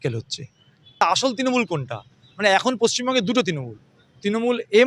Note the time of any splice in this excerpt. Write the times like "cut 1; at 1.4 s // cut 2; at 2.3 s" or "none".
cut 1; at 1.0 s